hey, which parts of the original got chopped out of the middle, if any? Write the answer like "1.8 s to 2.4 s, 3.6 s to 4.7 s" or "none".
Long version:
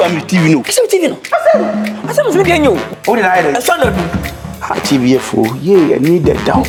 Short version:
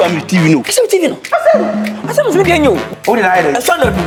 none